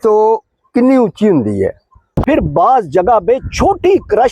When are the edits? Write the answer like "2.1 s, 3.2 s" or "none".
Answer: 2.2 s